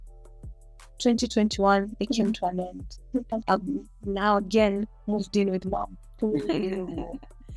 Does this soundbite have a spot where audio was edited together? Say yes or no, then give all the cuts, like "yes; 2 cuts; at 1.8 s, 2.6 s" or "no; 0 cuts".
yes; 1 cut; at 3.3 s